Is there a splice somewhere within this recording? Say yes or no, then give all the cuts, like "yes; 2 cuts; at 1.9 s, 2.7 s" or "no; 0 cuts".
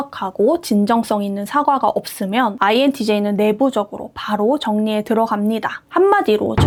no; 0 cuts